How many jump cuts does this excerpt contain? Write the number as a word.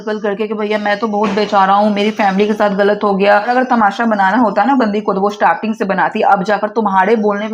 one